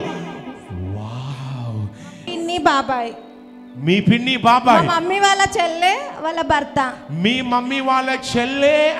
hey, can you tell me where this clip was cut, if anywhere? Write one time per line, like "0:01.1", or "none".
0:02.3